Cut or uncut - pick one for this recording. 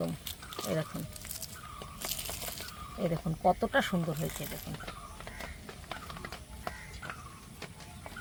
uncut